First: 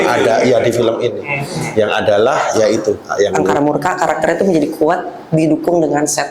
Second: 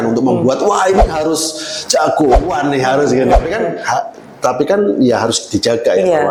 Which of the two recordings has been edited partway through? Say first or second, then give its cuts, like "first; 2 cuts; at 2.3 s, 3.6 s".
first; 1 cut; at 3.4 s